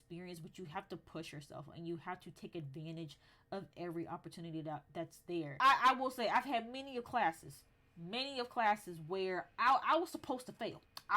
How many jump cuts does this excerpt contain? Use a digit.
1